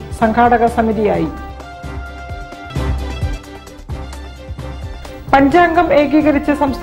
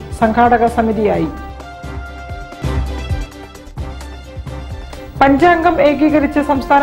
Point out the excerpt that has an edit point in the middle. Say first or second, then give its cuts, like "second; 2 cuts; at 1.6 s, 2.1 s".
first; 2 cuts; at 2.6 s, 4.9 s